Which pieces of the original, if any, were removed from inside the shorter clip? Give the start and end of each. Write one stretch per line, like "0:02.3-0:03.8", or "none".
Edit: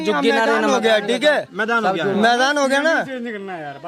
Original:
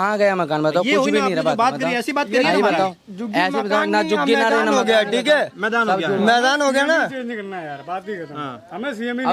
none